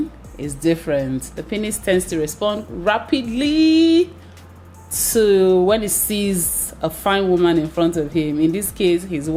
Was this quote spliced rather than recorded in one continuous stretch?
no; 0 cuts

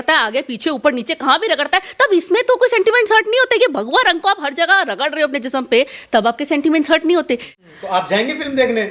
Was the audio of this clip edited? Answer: yes; 1 cut; at 7.5 s

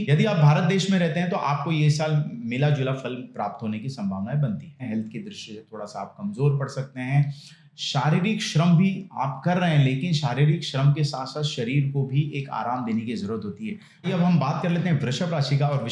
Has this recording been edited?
yes; 2 cuts; at 4.8 s, 14.1 s

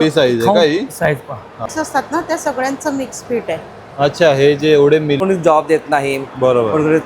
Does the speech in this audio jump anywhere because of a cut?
yes; 2 cuts; at 1.7 s, 5.2 s

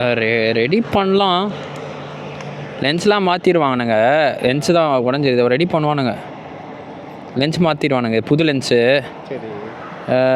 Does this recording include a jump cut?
no; 0 cuts

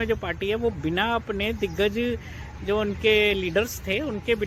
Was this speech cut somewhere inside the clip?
no; 0 cuts

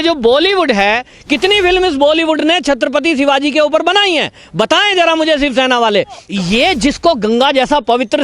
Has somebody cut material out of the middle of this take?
yes; 2 cuts; at 1.1 s, 6.2 s

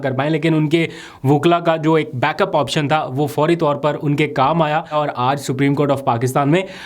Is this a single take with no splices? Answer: no; 1 cut; at 4.9 s

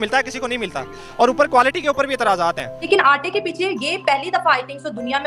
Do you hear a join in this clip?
yes; 1 cut; at 2.8 s

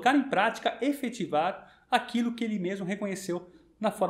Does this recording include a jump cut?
no; 0 cuts

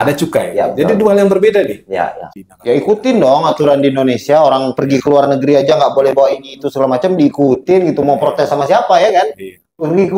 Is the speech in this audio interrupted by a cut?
yes; 1 cut; at 2.2 s

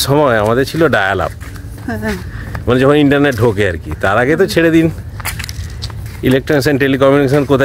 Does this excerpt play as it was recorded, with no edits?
yes; 0 cuts

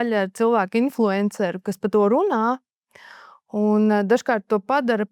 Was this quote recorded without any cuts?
yes; 0 cuts

